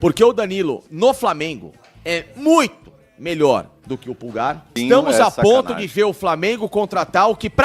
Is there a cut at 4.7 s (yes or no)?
yes